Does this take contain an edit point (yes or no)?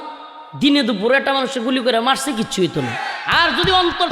yes